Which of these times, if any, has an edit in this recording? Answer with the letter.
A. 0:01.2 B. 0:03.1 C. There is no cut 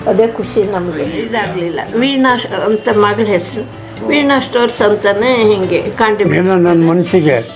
A